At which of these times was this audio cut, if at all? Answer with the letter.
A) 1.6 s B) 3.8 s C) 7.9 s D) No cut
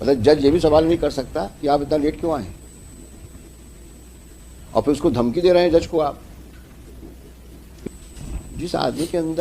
C